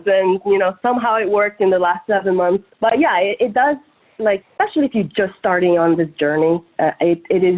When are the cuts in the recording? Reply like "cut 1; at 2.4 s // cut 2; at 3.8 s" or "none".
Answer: cut 1; at 2.7 s

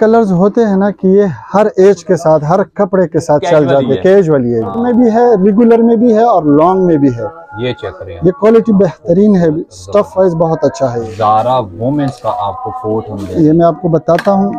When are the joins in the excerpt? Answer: cut 1; at 4.8 s // cut 2; at 11.0 s

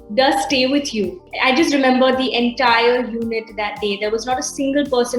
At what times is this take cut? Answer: cut 1; at 1.3 s

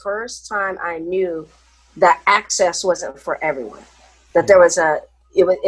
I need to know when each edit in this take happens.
none

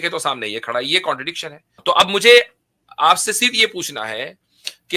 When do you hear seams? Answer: cut 1; at 1.8 s

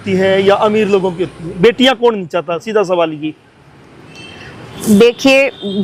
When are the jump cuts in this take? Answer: none

